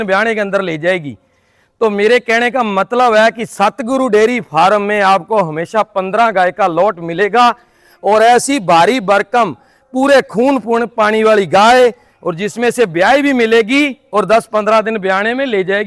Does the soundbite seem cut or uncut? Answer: uncut